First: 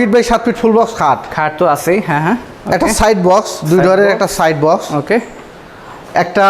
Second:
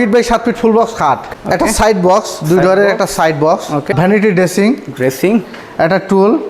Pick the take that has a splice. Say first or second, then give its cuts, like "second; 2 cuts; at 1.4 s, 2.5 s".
second; 2 cuts; at 1.3 s, 3.9 s